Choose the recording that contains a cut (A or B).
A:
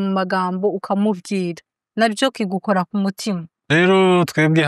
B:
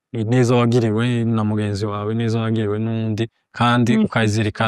A